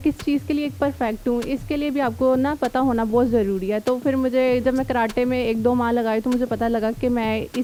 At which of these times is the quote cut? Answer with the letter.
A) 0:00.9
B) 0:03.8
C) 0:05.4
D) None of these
D